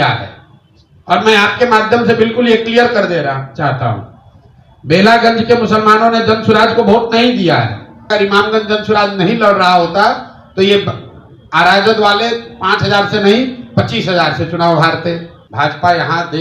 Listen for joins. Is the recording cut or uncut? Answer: cut